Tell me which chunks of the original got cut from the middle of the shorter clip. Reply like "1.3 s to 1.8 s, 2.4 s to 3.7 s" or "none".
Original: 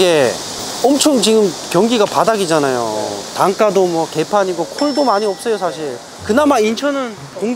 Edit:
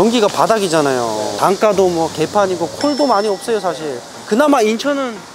3.1 s to 3.3 s